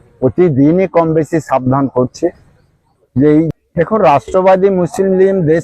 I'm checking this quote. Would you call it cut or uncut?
cut